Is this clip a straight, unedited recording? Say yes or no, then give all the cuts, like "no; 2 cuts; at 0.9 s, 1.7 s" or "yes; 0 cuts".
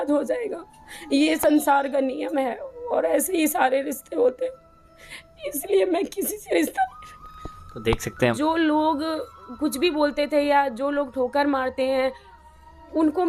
no; 1 cut; at 8.3 s